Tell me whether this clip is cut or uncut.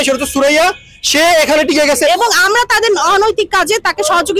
cut